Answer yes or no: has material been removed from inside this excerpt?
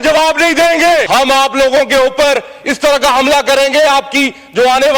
yes